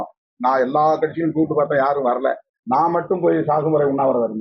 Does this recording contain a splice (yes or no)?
yes